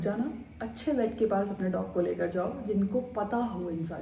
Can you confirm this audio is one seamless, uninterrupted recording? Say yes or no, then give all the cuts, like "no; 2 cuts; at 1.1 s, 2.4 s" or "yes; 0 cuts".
yes; 0 cuts